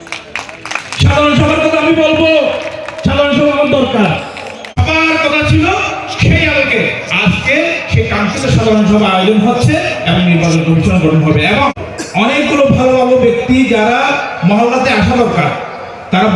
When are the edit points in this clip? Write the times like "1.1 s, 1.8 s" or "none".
4.8 s, 11.8 s